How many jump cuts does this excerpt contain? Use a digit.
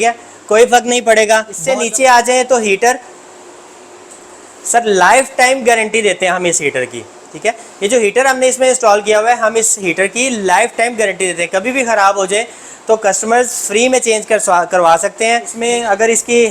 2